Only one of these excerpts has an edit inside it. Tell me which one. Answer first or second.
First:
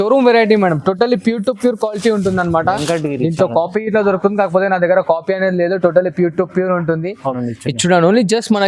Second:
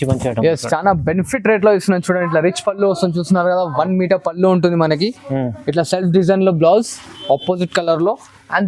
first